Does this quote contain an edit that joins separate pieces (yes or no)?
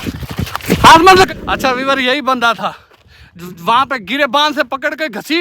yes